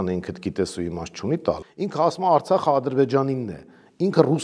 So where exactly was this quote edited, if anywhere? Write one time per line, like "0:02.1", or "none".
0:01.7